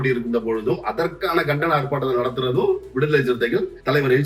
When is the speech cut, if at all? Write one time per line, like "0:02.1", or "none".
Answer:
none